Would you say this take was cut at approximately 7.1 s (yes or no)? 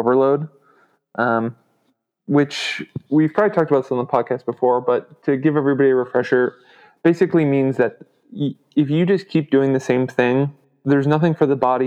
no